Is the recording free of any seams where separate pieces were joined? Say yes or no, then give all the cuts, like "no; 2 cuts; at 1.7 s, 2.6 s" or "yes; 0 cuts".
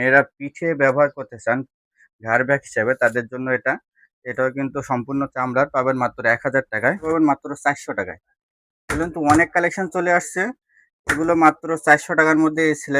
no; 1 cut; at 7.0 s